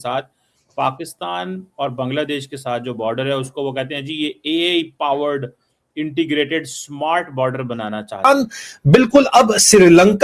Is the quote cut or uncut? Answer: cut